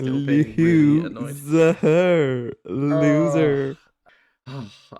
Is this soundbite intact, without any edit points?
no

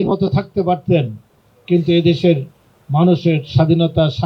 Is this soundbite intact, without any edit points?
yes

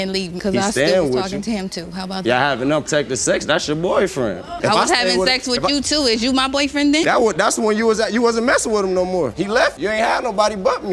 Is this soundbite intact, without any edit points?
yes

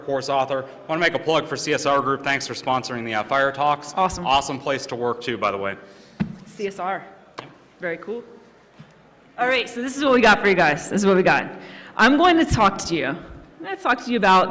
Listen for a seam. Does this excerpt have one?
yes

